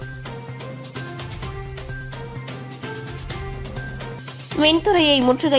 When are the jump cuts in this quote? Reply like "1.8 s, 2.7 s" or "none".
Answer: 1.5 s